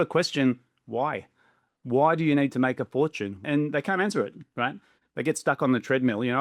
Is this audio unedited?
no; 1 cut; at 3.4 s

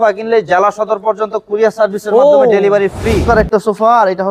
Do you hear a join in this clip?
yes; 1 cut; at 3.2 s

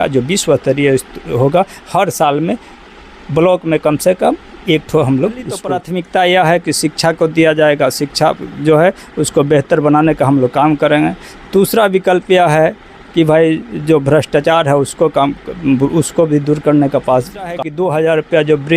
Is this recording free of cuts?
no; 2 cuts; at 5.7 s, 17.5 s

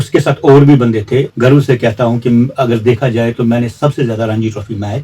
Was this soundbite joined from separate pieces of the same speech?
yes; 1 cut; at 1.3 s

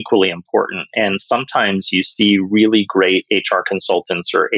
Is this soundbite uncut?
yes; 0 cuts

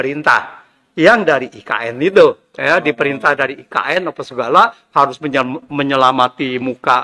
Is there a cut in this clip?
no; 0 cuts

